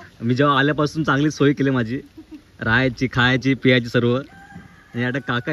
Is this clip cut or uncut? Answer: uncut